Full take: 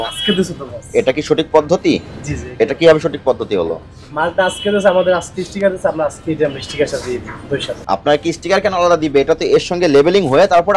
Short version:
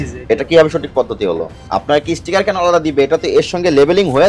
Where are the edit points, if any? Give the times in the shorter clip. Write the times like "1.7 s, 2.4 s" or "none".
1.6 s